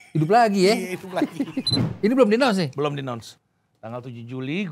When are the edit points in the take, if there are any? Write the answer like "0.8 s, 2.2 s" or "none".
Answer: 1.8 s